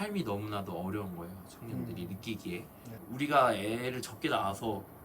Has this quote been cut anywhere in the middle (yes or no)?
yes